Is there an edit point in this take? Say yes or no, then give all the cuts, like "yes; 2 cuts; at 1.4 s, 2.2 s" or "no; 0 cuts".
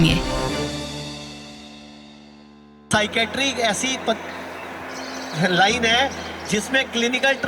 yes; 1 cut; at 2.9 s